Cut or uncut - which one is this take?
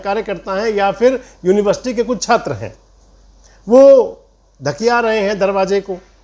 uncut